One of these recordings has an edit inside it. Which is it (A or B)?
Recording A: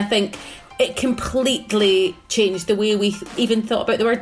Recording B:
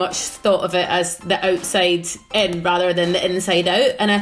A